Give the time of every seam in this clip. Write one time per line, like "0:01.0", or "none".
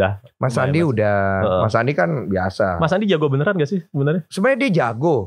none

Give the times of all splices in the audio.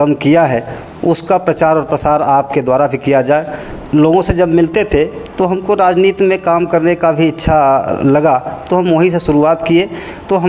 0:03.6

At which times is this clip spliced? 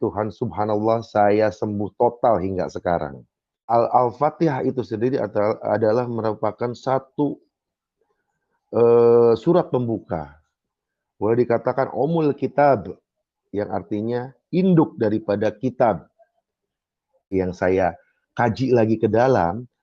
0:03.6
0:17.3

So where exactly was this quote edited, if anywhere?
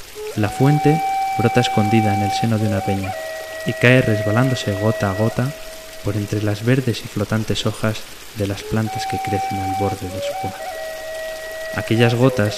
0:07.7

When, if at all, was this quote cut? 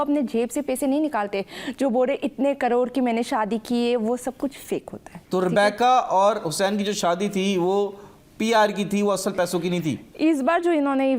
none

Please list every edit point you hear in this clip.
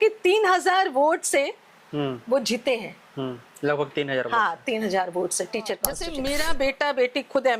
0:06.1

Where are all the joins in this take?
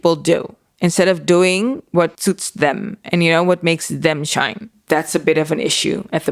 0:04.7

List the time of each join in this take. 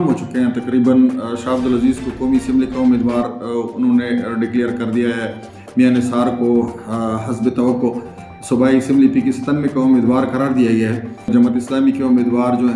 0:11.3

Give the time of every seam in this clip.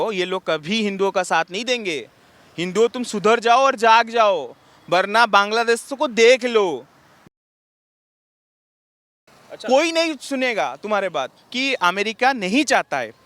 0:11.5

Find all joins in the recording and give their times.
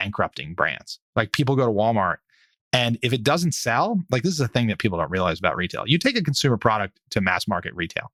none

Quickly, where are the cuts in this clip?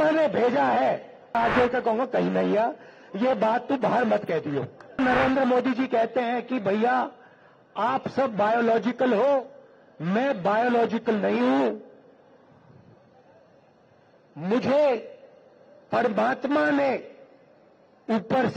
0:01.3
0:05.0

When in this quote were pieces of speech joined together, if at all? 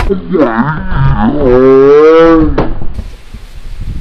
none

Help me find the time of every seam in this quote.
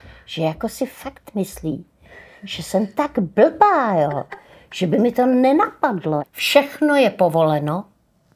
0:06.2

